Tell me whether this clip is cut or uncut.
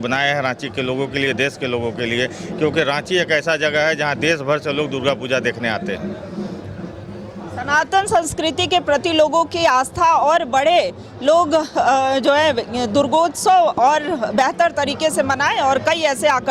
uncut